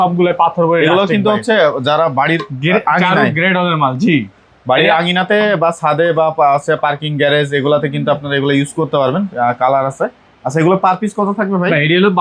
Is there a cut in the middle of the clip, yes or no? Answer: no